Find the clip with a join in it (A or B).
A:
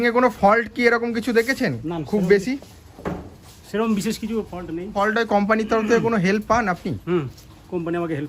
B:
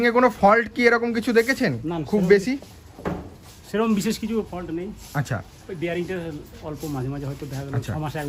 A